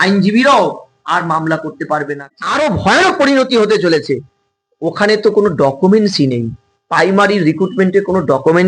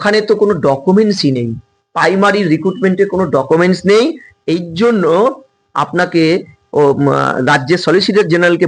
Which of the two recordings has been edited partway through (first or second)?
first